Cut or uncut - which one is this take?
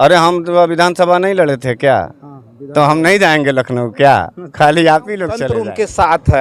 cut